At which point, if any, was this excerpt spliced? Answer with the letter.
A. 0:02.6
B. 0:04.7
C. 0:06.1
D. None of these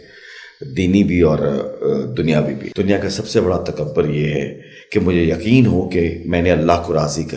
A